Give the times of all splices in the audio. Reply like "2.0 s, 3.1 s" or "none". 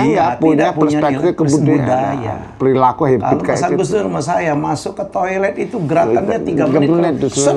none